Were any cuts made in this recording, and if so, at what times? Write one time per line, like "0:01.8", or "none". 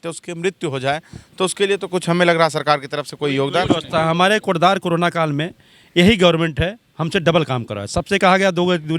none